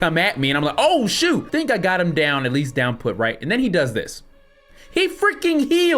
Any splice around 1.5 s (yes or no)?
yes